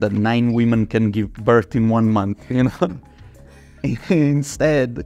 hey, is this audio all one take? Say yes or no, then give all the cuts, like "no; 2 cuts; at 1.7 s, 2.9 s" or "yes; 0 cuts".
yes; 0 cuts